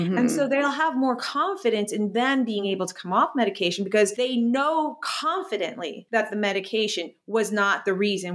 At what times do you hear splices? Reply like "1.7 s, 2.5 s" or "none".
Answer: 2.7 s, 4.1 s